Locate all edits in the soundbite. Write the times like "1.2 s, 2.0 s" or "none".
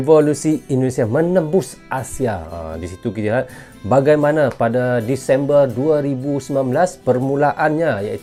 none